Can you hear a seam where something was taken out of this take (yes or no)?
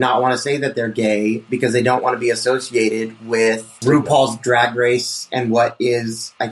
yes